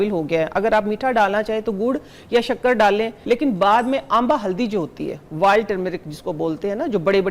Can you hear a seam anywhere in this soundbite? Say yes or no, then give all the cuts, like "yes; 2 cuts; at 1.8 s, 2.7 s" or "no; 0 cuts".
yes; 1 cut; at 3.2 s